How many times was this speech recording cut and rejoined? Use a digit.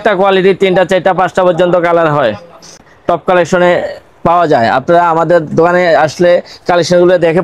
1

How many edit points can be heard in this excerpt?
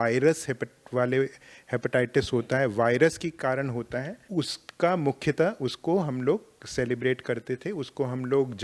1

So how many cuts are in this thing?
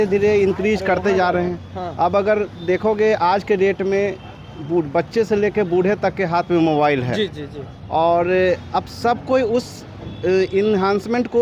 0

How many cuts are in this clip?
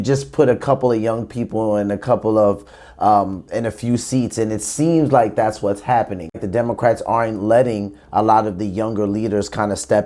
1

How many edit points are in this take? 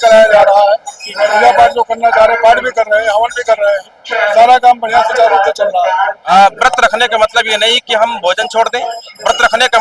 1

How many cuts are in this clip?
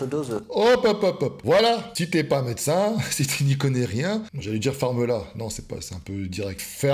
0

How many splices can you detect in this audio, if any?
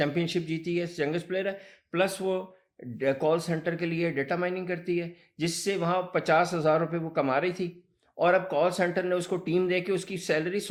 0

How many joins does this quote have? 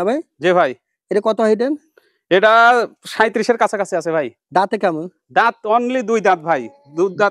0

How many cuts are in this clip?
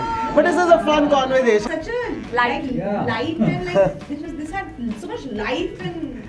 1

